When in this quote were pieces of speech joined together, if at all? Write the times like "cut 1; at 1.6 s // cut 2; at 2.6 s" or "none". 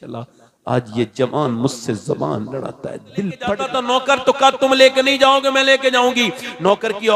cut 1; at 3.8 s